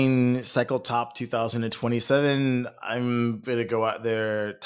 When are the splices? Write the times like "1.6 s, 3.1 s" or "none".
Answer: none